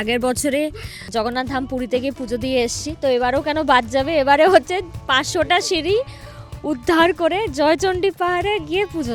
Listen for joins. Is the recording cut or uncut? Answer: uncut